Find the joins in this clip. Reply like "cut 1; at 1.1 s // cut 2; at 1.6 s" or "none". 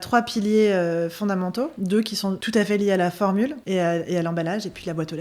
cut 1; at 1.8 s // cut 2; at 3.6 s